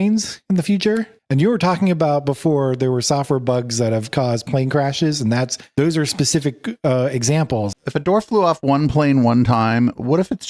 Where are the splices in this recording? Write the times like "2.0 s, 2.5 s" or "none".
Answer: 1.1 s, 7.7 s